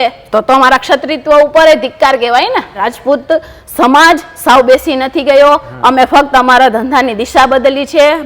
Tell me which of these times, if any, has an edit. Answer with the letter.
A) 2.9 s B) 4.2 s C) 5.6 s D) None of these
A